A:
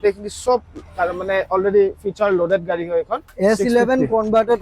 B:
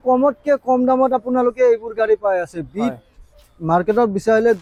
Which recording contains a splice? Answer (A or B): A